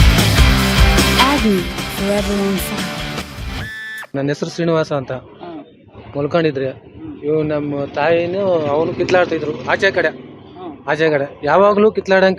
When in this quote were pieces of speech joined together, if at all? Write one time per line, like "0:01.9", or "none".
0:04.0